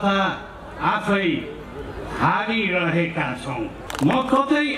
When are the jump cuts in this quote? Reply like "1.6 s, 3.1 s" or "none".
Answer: 3.9 s